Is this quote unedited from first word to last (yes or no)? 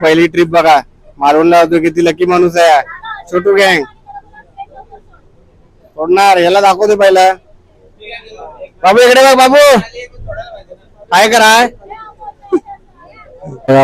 yes